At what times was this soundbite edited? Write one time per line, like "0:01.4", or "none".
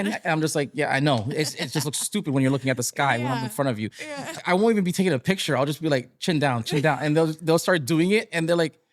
0:04.3